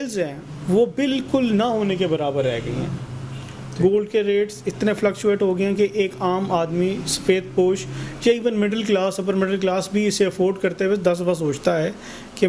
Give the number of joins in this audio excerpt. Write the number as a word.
zero